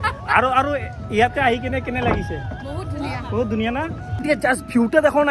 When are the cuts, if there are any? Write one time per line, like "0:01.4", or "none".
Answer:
0:04.2